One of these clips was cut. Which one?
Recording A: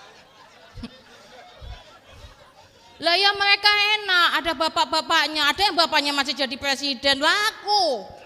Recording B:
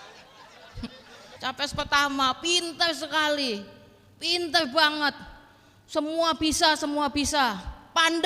B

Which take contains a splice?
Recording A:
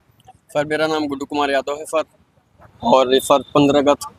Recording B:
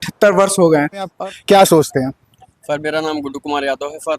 B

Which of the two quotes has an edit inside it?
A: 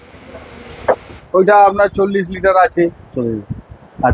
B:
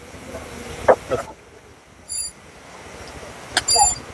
A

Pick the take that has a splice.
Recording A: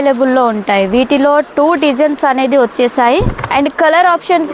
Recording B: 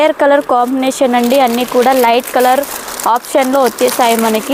A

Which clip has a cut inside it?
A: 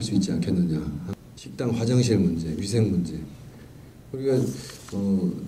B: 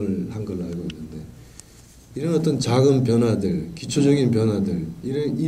A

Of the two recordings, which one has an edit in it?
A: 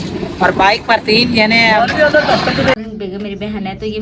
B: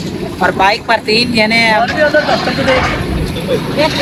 A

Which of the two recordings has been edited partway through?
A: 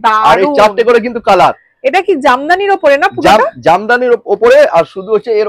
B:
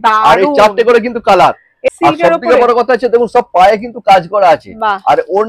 B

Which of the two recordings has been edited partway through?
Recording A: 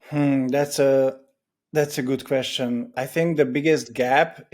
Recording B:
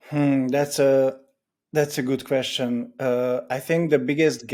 A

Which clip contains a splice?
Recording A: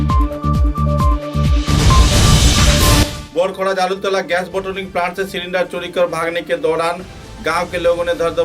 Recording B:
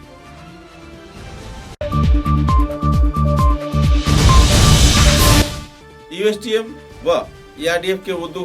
B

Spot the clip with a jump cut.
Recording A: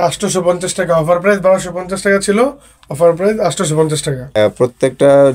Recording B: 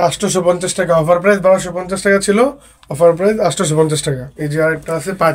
A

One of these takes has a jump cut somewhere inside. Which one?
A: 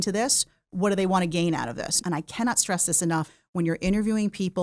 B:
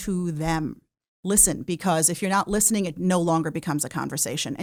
A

